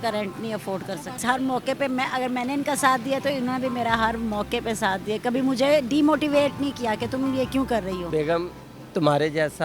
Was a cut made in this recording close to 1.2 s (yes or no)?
yes